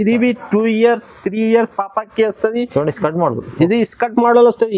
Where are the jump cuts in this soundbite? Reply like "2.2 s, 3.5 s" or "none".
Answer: none